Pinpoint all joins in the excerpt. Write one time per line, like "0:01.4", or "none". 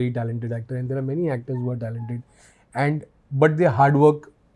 none